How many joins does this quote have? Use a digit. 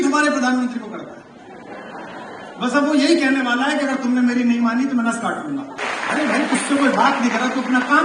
1